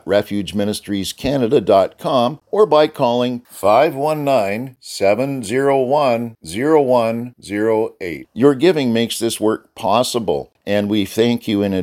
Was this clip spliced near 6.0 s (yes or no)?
no